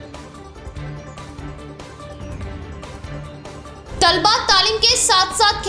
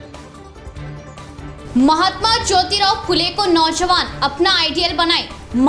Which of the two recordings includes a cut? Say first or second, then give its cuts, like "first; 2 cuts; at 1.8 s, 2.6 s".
second; 1 cut; at 1.4 s